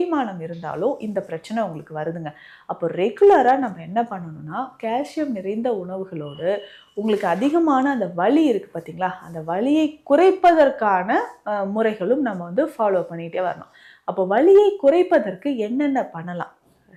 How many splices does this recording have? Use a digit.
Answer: 0